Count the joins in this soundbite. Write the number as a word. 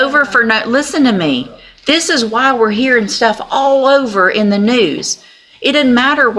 zero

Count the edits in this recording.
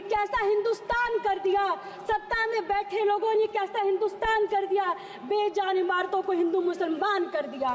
zero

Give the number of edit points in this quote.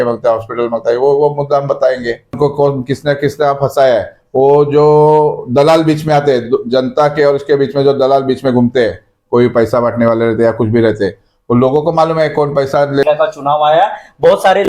two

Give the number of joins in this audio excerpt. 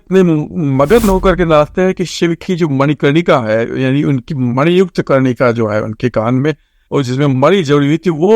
one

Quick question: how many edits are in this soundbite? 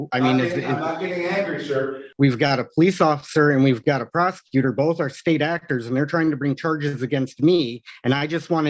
one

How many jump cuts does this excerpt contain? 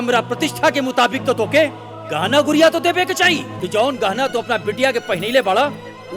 one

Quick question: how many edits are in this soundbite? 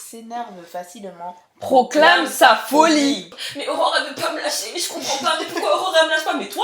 one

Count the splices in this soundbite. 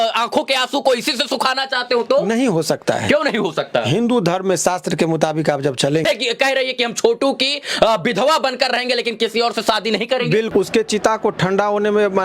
two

